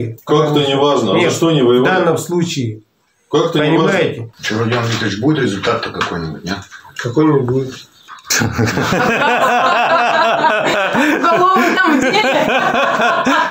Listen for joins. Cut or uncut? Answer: cut